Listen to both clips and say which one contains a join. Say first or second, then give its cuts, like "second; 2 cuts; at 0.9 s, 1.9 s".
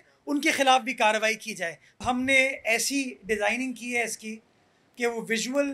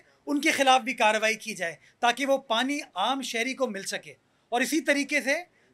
first; 1 cut; at 2.0 s